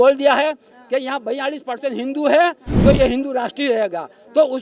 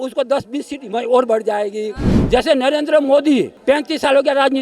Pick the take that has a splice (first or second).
second